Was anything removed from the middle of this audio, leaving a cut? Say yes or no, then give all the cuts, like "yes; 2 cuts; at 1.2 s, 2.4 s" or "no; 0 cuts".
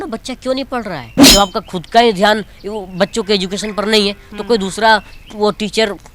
yes; 1 cut; at 1.1 s